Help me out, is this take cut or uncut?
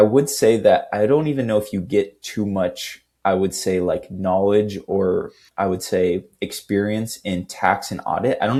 uncut